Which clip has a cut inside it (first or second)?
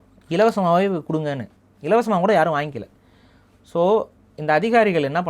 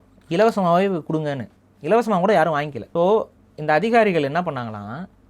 second